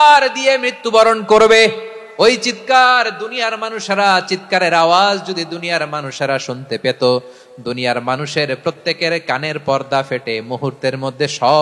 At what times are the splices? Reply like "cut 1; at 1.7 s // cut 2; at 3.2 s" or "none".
none